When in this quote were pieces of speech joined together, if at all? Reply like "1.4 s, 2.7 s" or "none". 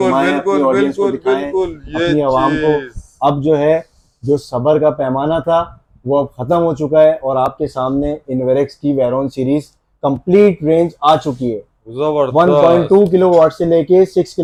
none